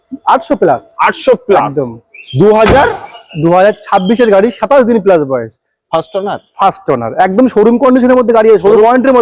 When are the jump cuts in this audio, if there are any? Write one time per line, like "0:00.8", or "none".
none